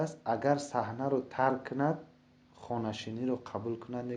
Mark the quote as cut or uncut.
uncut